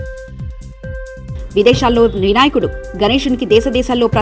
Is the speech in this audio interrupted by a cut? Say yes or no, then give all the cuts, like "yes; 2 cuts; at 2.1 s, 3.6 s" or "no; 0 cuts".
yes; 1 cut; at 1.3 s